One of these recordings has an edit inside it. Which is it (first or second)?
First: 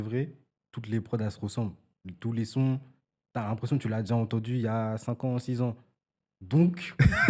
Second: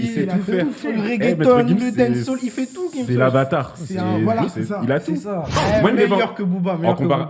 second